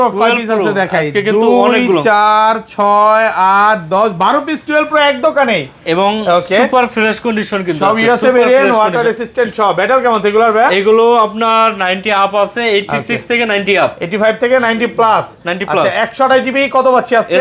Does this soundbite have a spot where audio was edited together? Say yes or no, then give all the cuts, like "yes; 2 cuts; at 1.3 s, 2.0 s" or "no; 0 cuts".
no; 0 cuts